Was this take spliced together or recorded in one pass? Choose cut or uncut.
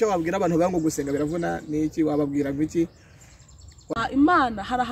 cut